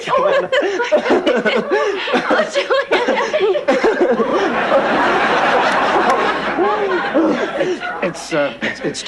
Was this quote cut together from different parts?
yes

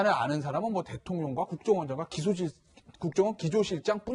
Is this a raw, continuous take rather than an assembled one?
no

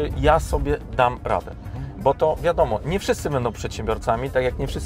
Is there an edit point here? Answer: no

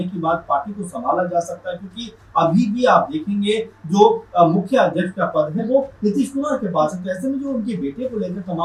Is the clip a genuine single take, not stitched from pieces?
yes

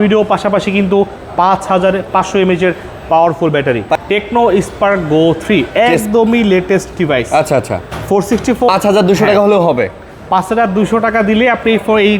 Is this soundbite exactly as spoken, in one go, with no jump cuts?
no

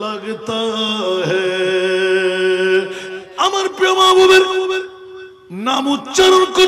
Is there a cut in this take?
yes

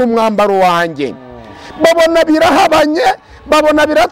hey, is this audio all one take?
yes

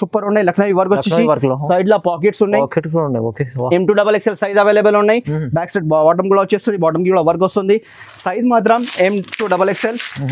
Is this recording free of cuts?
yes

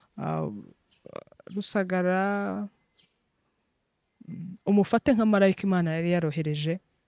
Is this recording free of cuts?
yes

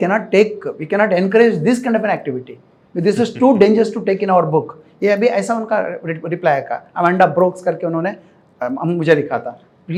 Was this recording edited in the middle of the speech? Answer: no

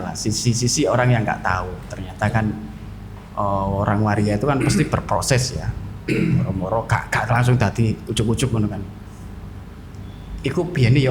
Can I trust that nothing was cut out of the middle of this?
yes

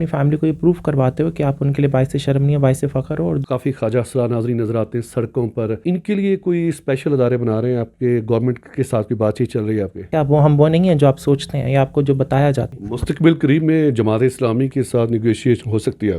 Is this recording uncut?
no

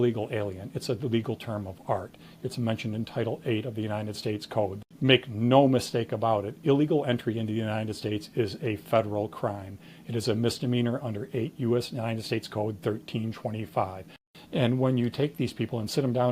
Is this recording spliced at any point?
yes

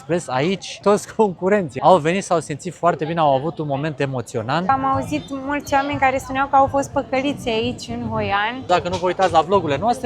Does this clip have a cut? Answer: yes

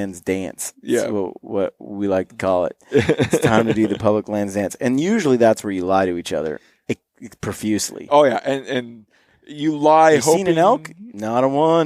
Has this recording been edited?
no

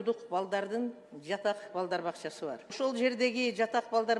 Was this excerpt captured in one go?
no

